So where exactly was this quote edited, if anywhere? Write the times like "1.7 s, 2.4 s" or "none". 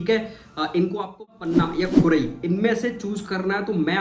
1.3 s